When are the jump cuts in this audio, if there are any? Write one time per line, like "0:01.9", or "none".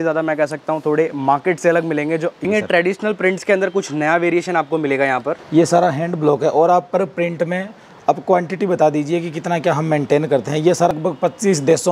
0:02.4
0:05.4
0:10.9